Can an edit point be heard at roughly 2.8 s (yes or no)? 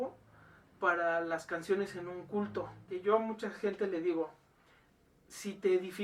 yes